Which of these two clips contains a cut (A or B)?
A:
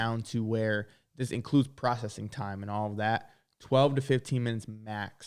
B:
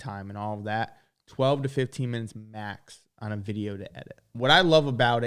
B